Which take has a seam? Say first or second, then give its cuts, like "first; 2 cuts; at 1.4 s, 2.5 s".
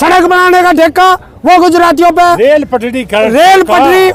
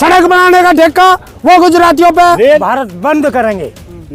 second; 1 cut; at 2.6 s